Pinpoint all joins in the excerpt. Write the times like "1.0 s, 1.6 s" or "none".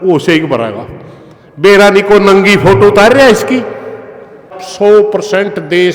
4.6 s